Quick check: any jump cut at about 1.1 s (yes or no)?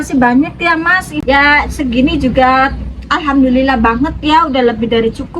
yes